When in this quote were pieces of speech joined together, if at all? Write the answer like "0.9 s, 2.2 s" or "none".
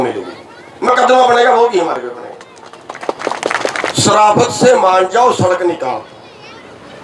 3.9 s